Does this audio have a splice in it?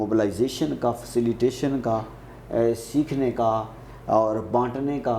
no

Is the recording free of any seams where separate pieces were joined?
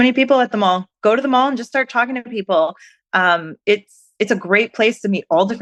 yes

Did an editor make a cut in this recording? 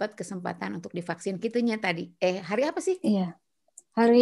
no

